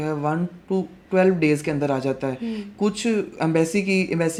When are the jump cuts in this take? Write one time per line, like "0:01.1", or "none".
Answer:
none